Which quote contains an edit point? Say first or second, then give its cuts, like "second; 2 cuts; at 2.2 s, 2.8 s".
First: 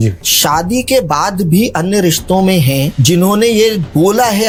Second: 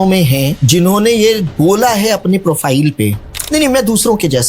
second; 1 cut; at 3.3 s